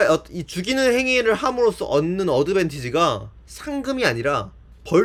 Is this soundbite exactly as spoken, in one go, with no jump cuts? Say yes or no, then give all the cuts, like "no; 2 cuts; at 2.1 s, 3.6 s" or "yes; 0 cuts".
yes; 0 cuts